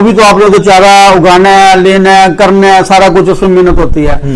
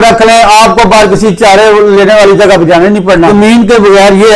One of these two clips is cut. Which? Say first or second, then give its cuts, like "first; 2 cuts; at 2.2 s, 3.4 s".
second; 1 cut; at 3.3 s